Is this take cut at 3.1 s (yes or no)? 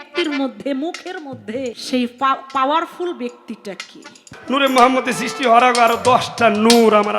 no